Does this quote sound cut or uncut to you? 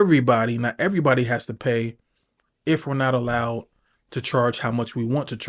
uncut